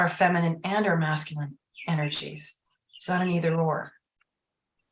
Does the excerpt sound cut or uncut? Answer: uncut